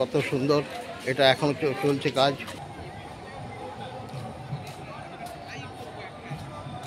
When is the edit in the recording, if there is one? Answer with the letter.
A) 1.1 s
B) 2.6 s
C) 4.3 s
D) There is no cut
B